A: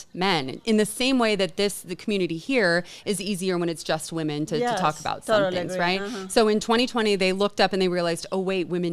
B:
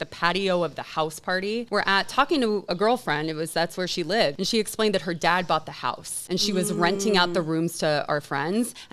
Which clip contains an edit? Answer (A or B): B